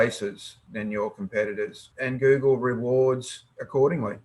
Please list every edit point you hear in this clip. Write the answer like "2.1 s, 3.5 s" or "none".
1.8 s